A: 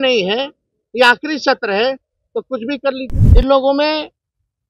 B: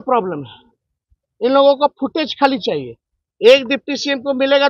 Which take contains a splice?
A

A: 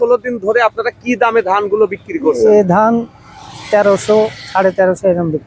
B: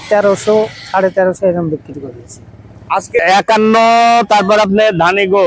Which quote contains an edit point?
B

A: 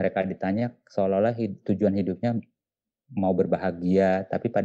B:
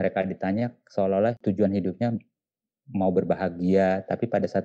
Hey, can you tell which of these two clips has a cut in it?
B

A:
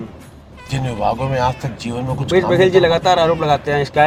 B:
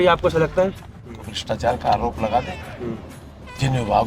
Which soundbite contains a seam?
B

